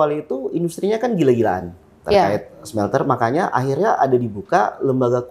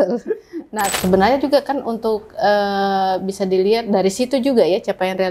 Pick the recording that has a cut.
second; 1 cut; at 0.9 s

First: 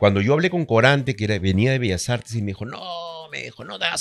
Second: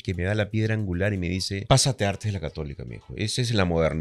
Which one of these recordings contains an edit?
second; 1 cut; at 1.6 s

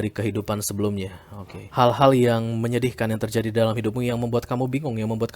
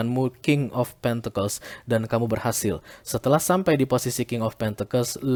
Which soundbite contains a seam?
first; 1 cut; at 1.5 s

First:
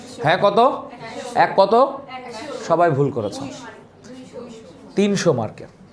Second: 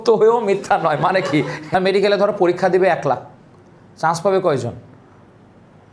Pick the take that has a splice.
second; 1 cut; at 1.7 s

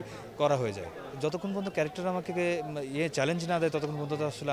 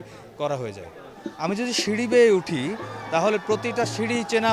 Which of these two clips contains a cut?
first; 1 cut; at 1.2 s

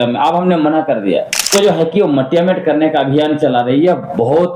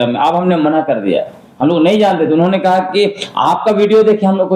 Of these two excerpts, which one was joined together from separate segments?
first; 1 cut; at 1.4 s

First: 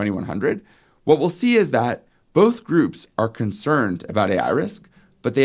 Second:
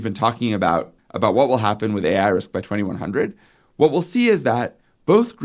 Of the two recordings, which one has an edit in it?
second; 1 cut; at 1.0 s

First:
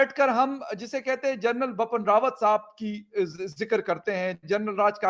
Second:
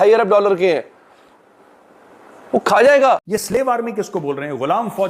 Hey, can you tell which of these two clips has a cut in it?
second; 1 cut; at 3.8 s

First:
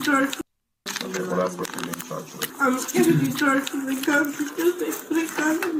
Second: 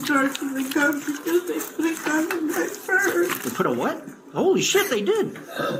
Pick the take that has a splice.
first; 2 cuts; at 0.7 s, 2.4 s

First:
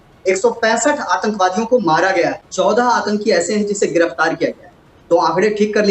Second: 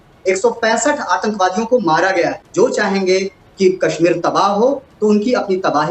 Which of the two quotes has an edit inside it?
second; 1 cut; at 2.4 s

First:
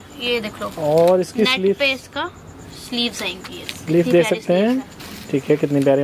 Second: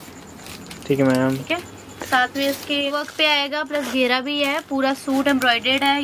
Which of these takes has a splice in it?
second; 1 cut; at 2.9 s

